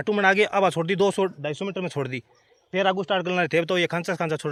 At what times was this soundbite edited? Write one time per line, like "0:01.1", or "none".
none